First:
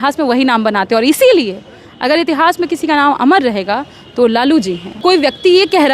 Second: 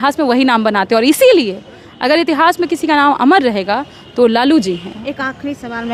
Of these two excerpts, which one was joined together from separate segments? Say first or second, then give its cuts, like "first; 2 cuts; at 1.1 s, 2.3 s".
first; 1 cut; at 4.9 s